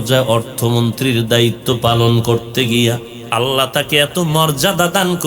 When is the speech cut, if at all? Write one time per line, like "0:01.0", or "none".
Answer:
0:03.1